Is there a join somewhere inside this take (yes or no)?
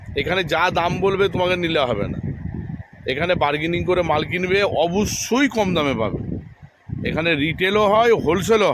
no